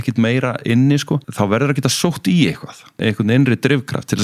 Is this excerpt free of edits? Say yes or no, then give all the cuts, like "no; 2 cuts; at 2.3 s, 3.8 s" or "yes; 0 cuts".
no; 2 cuts; at 1.3 s, 3.0 s